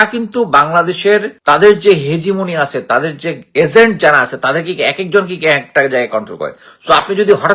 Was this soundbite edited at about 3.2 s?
no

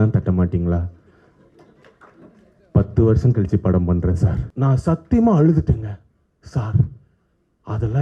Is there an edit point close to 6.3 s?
no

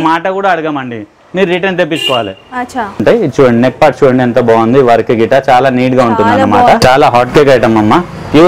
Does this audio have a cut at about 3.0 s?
yes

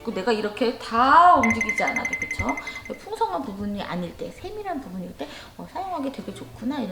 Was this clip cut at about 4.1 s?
no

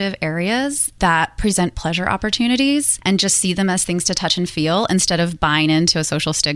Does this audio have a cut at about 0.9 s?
yes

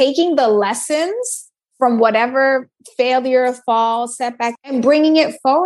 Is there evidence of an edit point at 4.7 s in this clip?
yes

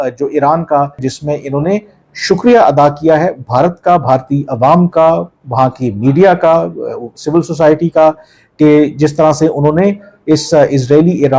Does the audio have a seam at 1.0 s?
yes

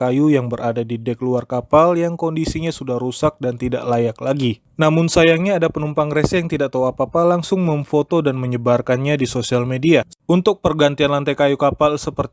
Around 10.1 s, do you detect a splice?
yes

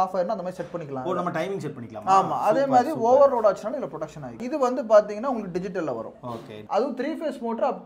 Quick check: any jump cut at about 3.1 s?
no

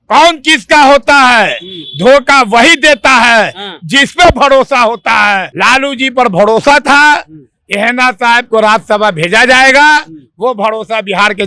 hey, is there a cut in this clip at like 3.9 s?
no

